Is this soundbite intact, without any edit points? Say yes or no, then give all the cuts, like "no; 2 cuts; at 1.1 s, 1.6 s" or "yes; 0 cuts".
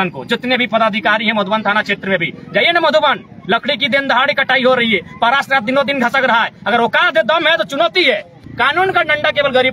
no; 1 cut; at 8.4 s